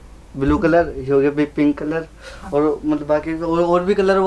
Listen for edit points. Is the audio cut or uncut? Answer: uncut